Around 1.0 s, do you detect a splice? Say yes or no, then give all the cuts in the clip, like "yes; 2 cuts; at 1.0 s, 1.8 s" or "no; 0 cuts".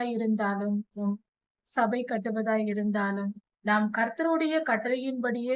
yes; 1 cut; at 1.0 s